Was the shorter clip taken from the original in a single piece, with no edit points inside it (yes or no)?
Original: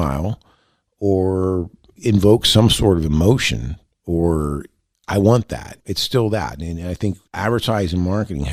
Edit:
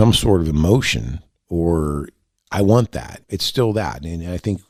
yes